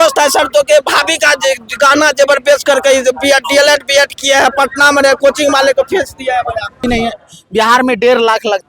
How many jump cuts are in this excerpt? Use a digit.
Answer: 1